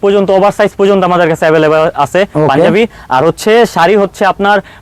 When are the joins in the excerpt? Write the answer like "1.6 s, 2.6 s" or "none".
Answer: none